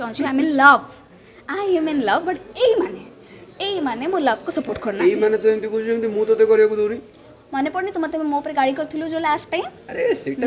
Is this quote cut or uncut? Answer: uncut